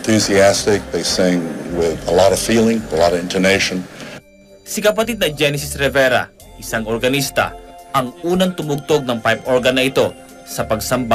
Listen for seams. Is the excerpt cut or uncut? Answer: uncut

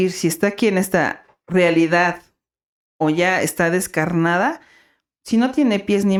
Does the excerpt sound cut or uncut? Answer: uncut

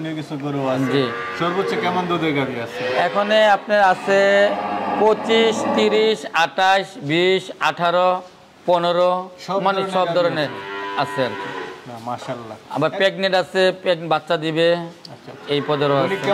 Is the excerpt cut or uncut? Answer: uncut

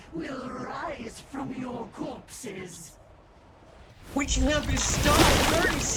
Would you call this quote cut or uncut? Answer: uncut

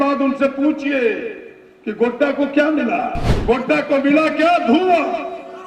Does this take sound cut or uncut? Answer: cut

